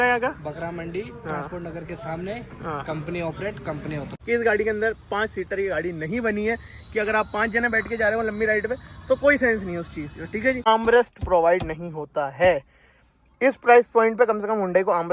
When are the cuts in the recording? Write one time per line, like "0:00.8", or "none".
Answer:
0:04.1
0:10.7